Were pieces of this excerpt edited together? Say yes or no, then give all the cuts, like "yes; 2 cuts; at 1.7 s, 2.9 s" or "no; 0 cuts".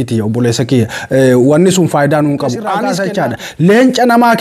yes; 1 cut; at 2.8 s